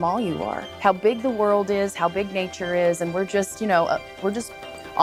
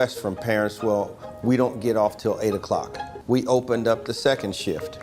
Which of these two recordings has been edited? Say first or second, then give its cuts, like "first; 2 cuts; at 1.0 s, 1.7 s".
second; 1 cut; at 3.1 s